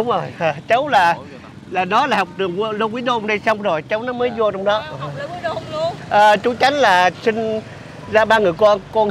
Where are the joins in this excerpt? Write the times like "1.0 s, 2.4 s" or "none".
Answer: 6.0 s